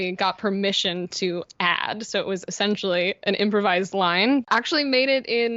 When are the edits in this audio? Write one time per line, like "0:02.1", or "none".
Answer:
0:04.5

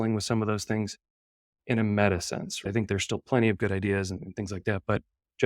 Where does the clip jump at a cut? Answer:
0:02.6

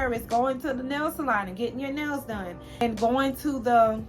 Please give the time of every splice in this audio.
0:02.8

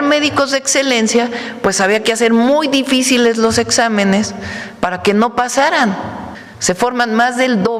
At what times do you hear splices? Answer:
none

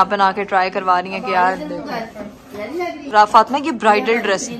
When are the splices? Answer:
none

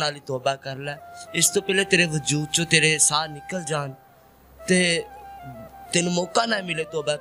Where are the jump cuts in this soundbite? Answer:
none

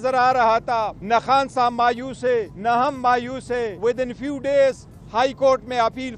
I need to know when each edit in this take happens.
0:01.0
0:02.5
0:03.7

